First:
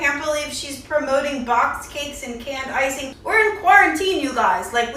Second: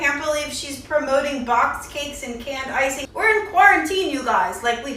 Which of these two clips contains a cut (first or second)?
second